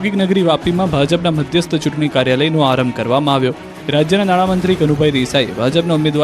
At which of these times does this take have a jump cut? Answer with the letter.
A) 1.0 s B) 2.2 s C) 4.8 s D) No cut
C